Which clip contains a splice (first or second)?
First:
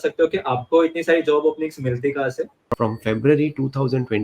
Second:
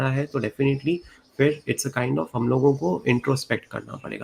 first